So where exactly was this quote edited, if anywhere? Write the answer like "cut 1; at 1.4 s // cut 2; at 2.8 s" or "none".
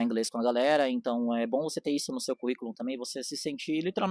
none